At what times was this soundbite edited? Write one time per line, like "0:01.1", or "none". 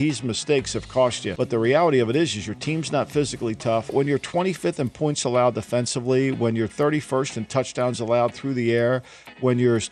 0:01.2
0:03.9